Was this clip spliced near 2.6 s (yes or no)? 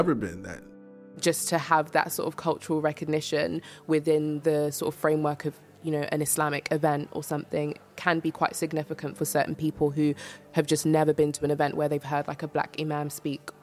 no